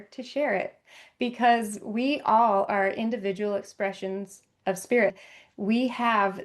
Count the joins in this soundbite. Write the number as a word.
one